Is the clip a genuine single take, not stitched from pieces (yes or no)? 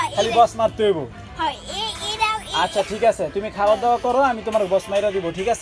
yes